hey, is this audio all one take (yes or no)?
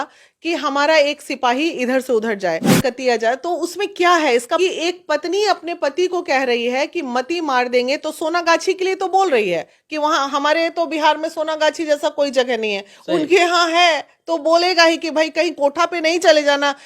no